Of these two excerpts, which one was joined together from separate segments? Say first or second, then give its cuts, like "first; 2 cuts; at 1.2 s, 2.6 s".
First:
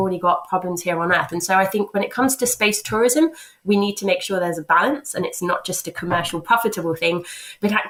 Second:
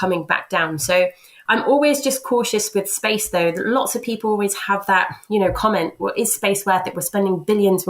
second; 1 cut; at 1.3 s